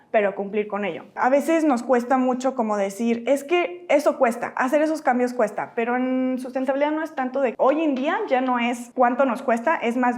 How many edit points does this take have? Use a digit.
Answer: 3